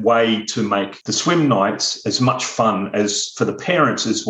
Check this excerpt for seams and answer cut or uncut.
cut